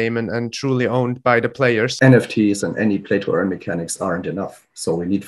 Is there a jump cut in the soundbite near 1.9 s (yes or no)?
yes